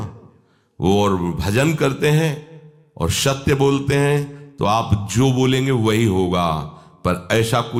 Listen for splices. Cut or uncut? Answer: uncut